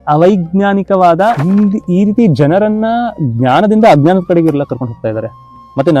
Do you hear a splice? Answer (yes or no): yes